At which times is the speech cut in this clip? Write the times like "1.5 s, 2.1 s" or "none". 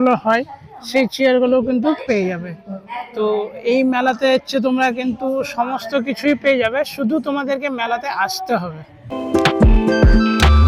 none